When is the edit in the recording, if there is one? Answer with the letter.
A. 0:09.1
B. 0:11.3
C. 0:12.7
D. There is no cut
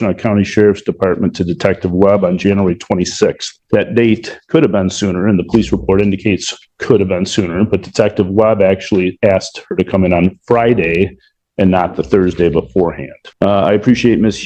D